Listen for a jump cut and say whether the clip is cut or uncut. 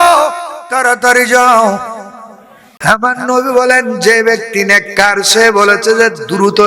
cut